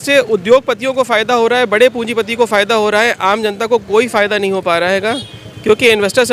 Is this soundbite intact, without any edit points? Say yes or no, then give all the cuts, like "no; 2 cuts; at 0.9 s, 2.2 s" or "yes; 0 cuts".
yes; 0 cuts